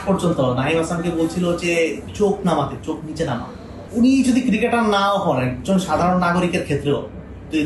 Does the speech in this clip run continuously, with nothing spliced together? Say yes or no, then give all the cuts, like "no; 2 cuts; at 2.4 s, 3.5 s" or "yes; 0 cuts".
no; 1 cut; at 3.8 s